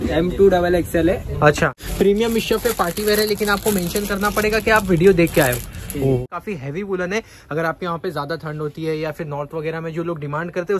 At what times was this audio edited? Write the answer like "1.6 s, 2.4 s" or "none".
1.8 s, 6.2 s